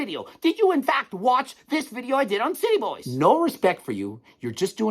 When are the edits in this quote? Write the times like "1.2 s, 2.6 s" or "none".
3.0 s